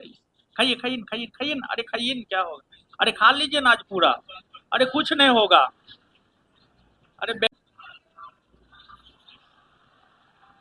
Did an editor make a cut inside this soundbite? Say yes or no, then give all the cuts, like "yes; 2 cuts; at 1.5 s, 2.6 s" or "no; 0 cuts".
yes; 1 cut; at 7.5 s